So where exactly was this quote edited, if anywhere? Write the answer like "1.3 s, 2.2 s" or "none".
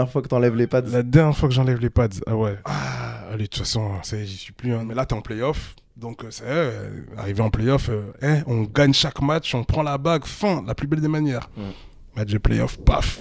2.6 s, 4.8 s, 8.1 s